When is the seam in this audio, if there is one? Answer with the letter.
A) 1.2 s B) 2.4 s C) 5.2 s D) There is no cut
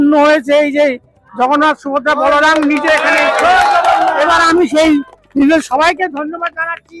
D